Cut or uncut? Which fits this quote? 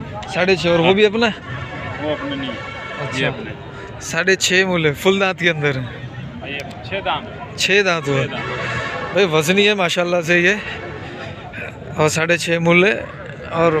uncut